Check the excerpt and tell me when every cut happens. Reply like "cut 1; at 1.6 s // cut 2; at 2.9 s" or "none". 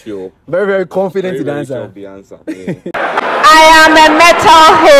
cut 1; at 2.9 s